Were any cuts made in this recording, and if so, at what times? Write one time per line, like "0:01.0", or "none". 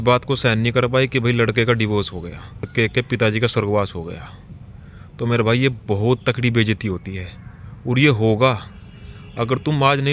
0:02.7